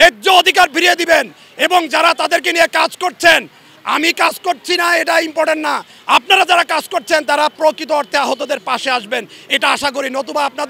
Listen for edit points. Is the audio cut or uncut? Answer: uncut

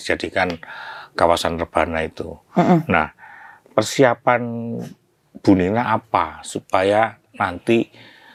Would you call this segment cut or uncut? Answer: uncut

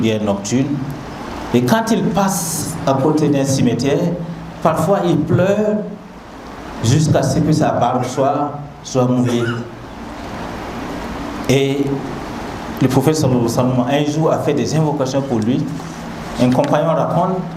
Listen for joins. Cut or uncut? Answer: uncut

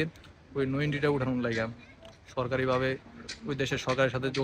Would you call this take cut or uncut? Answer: uncut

